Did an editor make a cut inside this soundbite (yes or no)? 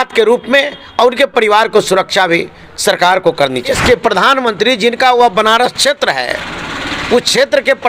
yes